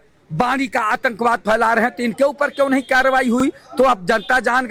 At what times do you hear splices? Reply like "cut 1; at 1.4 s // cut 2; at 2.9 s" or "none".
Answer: none